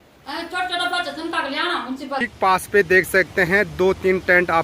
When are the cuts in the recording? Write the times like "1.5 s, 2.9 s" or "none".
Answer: 2.3 s